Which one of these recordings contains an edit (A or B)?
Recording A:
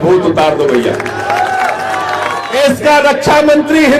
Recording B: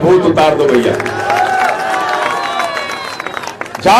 A